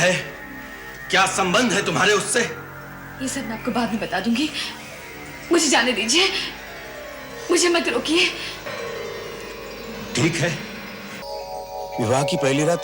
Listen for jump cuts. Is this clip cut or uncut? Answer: cut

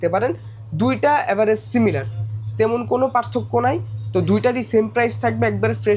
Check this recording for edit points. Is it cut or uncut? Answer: uncut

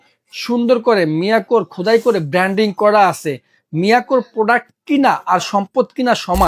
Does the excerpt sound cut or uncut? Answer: uncut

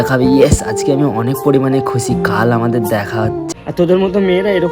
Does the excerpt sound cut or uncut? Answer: cut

